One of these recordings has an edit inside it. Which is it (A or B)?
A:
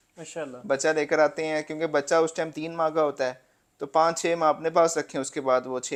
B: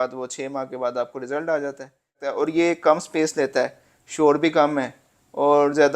B